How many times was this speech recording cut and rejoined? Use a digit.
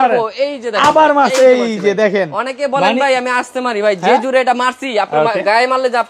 0